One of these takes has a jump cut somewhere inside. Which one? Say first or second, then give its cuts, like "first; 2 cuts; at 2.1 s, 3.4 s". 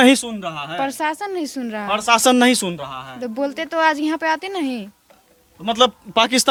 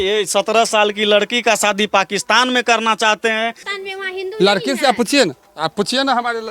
second; 1 cut; at 3.6 s